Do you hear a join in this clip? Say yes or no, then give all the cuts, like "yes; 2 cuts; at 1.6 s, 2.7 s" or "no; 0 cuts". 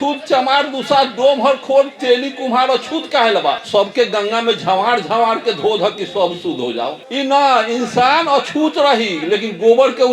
yes; 2 cuts; at 3.6 s, 7.0 s